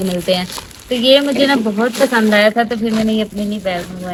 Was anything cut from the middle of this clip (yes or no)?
no